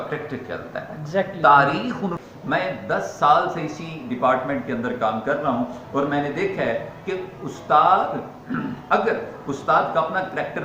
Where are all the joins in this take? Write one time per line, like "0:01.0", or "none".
0:02.2